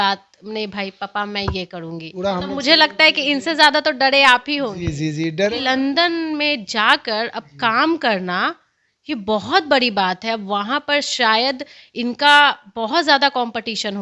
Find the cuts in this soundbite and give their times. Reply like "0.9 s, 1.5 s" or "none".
2.1 s, 5.5 s

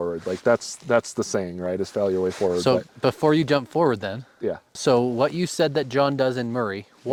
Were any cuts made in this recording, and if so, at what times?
none

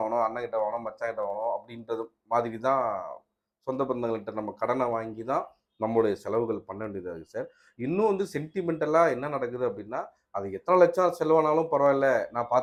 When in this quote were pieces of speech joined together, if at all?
none

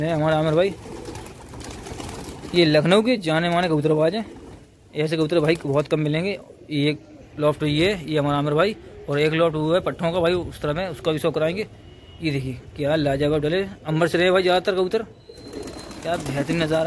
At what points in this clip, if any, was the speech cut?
none

